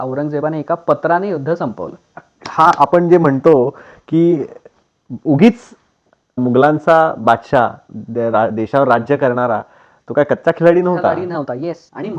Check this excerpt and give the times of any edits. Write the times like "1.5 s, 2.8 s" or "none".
2.1 s